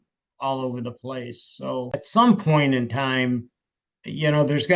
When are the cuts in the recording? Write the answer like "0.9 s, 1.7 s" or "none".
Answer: 1.9 s